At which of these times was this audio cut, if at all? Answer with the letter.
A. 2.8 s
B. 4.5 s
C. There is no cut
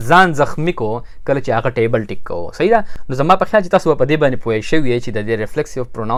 C